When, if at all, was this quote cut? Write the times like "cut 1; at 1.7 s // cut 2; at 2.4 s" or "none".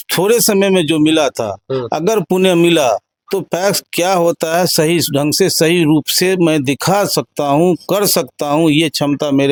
none